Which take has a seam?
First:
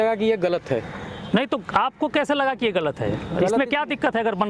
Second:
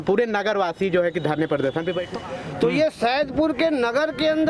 second; 1 cut; at 2.1 s

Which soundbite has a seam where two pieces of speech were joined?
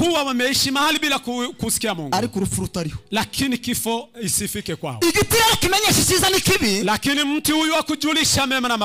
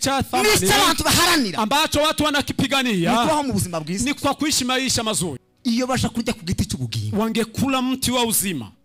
second; 1 cut; at 5.5 s

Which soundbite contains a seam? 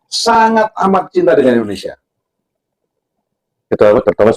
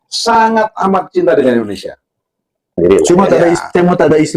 second; 1 cut; at 2.7 s

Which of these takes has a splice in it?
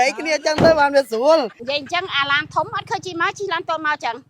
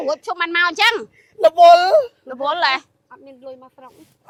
first; 1 cut; at 1.6 s

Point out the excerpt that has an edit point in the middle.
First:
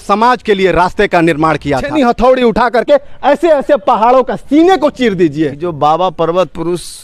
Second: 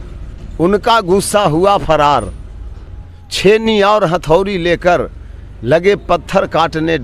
first; 2 cuts; at 1.9 s, 5.6 s

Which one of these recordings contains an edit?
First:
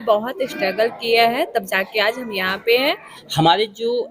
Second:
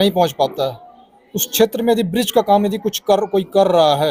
first; 1 cut; at 3.1 s

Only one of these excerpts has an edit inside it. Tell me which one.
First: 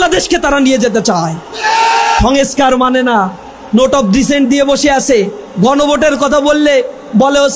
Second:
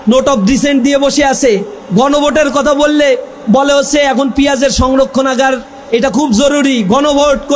first; 1 cut; at 2.2 s

